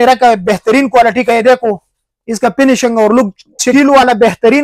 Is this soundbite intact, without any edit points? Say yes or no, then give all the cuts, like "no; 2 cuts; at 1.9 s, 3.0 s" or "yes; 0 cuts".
no; 1 cut; at 3.7 s